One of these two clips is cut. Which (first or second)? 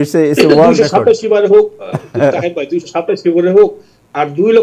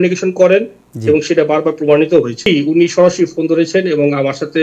second